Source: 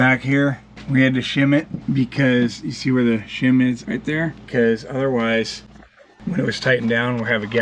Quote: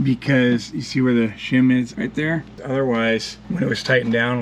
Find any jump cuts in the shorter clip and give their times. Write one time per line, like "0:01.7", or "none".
0:02.6
0:03.4